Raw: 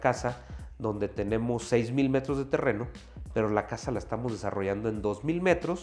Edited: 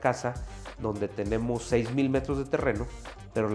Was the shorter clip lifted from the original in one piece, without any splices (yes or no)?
yes